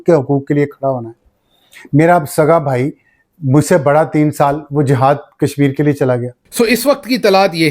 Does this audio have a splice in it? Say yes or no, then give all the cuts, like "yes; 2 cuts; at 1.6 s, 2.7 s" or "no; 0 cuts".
yes; 1 cut; at 6.4 s